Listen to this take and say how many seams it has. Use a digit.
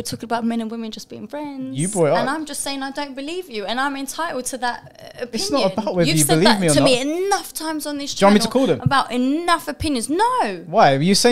0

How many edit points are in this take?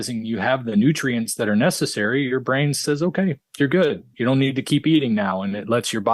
0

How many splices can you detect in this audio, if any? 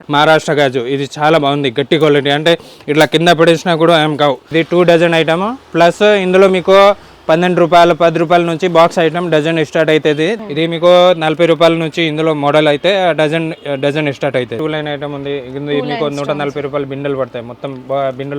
3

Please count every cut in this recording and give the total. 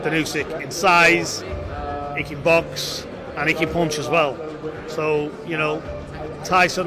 0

